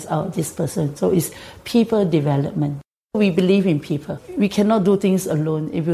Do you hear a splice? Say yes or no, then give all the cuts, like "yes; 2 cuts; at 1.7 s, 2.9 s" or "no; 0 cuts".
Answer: yes; 2 cuts; at 3.2 s, 4.2 s